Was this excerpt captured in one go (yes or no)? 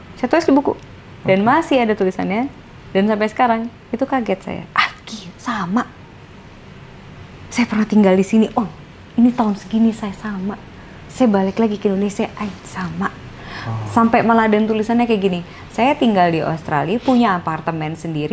yes